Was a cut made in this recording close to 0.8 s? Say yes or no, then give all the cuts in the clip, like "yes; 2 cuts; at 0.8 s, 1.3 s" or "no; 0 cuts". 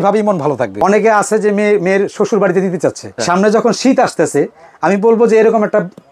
yes; 2 cuts; at 0.8 s, 3.2 s